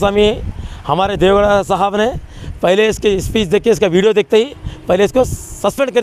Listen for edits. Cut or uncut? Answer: uncut